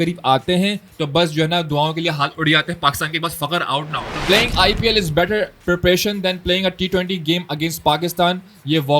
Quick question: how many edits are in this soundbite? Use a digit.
1